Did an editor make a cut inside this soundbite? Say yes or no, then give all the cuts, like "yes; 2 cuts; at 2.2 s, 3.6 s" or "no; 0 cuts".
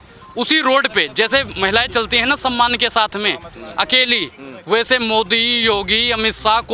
no; 0 cuts